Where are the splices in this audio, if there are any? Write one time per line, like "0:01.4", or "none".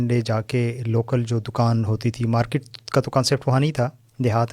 none